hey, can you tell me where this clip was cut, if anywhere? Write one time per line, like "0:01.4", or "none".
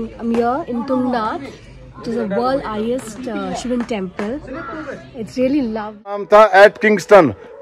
0:06.2